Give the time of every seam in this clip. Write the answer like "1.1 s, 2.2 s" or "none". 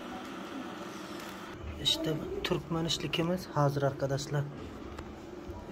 1.6 s